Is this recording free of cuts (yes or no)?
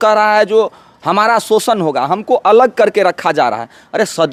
yes